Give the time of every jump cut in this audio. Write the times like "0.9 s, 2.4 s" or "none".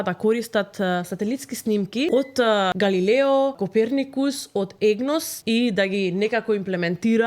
2.4 s, 3.6 s, 5.3 s